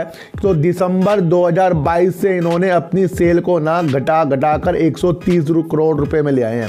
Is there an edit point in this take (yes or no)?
no